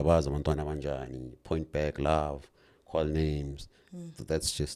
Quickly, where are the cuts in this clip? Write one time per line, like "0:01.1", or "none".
none